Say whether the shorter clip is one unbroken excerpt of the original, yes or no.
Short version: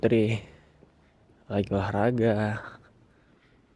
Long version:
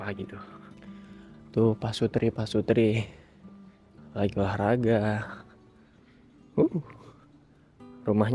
yes